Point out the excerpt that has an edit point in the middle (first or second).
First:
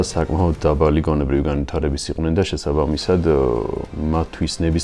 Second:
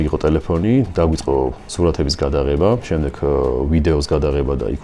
second